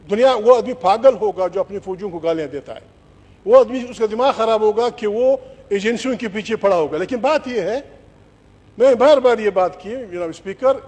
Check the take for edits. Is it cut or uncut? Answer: uncut